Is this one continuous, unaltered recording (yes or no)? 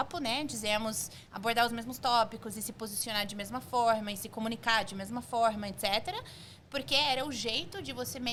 yes